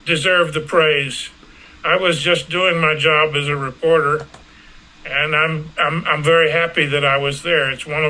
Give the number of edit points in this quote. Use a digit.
0